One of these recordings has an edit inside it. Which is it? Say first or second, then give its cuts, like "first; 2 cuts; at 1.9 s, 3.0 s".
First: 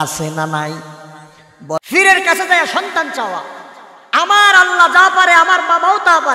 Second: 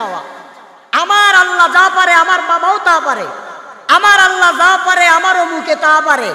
first; 1 cut; at 1.8 s